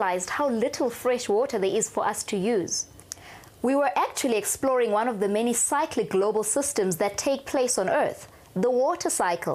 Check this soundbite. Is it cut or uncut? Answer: cut